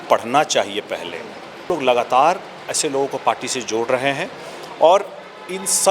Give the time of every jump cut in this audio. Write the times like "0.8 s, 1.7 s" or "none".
1.7 s